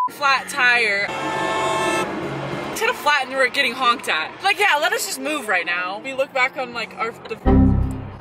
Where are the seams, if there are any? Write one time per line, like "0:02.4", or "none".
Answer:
0:01.0
0:02.8
0:06.1